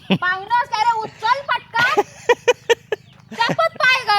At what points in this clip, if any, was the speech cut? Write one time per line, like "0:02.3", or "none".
0:03.2

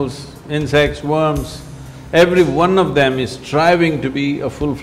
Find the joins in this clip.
none

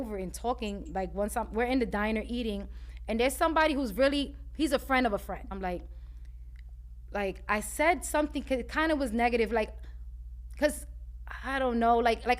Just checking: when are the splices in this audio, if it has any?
0:05.5

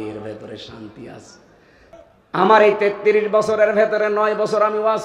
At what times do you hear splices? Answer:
0:01.8

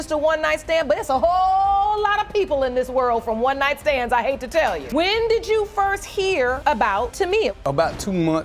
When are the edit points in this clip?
none

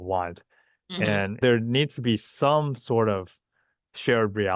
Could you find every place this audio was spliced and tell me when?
none

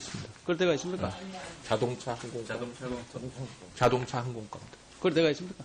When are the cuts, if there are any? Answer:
none

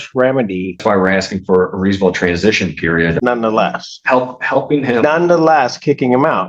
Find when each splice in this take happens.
0:00.8
0:03.2

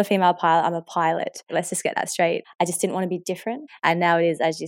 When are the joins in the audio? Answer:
0:01.5
0:02.4
0:03.7

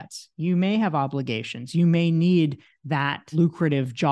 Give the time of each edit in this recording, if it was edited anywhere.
0:03.2

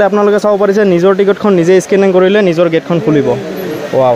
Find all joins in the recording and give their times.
none

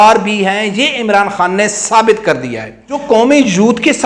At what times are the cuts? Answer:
0:03.0

